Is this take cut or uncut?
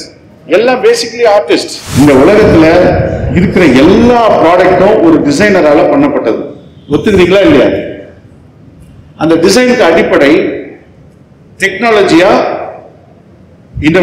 cut